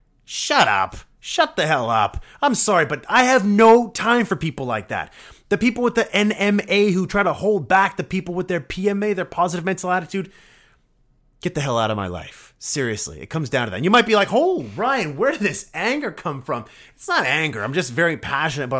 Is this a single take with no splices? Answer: yes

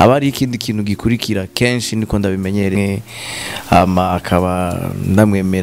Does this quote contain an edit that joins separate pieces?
yes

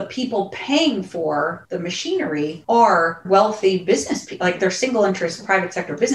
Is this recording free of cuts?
no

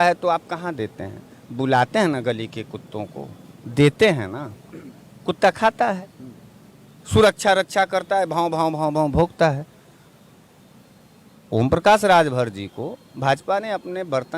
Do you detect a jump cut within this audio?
no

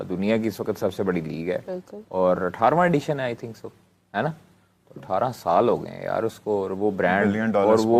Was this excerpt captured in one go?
yes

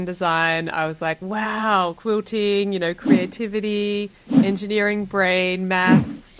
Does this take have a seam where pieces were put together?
no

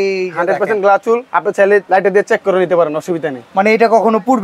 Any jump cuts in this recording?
yes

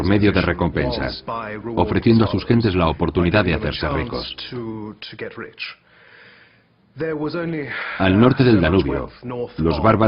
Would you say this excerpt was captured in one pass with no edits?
no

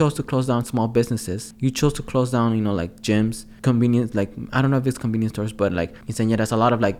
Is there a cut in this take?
yes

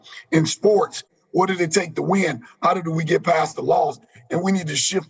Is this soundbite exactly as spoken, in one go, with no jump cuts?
no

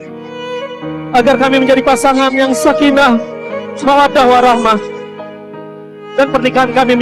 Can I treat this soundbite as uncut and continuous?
no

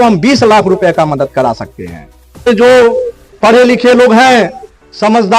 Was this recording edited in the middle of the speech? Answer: yes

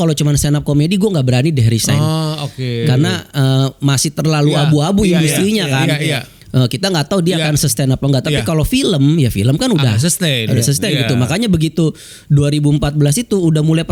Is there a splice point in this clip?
no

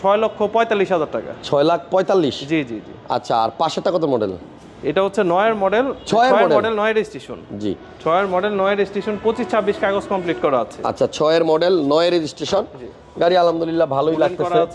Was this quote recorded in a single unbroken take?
yes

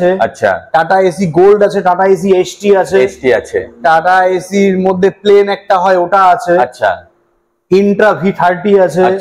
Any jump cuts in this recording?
no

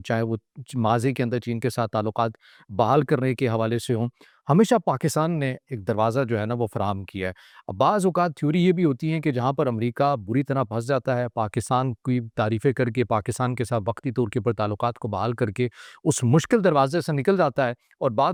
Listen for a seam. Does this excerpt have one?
no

